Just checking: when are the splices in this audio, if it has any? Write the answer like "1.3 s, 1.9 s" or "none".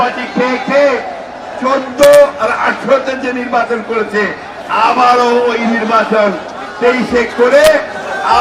none